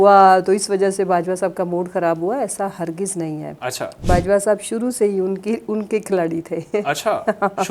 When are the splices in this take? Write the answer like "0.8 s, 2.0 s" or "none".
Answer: none